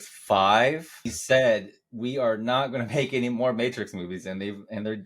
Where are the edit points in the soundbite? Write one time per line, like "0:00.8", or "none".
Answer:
0:01.2